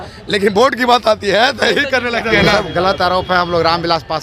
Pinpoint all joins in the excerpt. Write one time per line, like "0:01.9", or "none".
0:02.3